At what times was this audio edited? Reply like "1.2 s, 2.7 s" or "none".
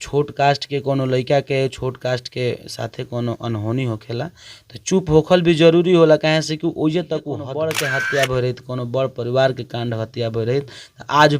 7.5 s